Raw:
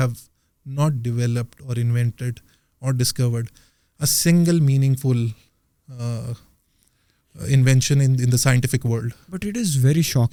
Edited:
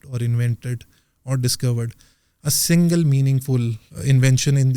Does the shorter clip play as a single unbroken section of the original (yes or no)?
no